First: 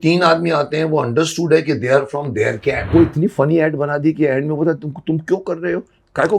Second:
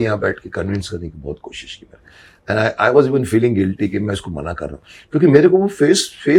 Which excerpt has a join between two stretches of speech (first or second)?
first